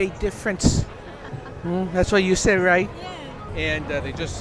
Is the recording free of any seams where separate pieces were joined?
no; 1 cut; at 3.4 s

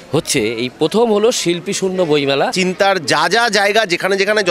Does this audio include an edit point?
yes; 1 cut; at 2.5 s

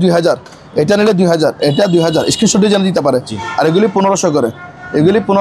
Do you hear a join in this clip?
no; 0 cuts

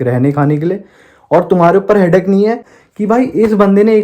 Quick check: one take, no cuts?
no; 1 cut; at 2.9 s

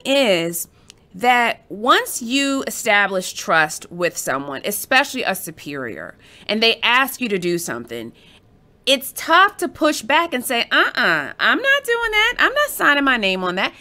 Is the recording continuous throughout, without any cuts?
yes; 0 cuts

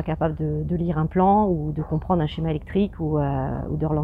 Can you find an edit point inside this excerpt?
no; 0 cuts

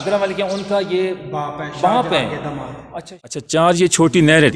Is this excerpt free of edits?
no; 1 cut; at 3.1 s

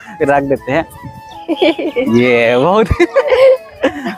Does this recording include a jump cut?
no; 0 cuts

